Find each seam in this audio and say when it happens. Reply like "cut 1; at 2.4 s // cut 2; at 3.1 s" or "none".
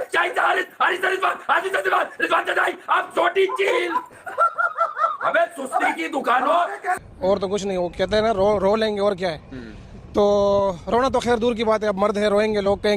cut 1; at 7.0 s